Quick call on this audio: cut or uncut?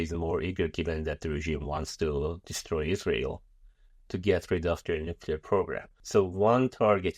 cut